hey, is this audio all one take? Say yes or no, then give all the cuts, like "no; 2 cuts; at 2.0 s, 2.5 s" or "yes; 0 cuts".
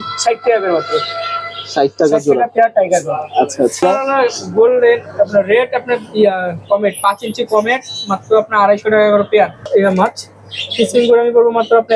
no; 2 cuts; at 3.8 s, 9.7 s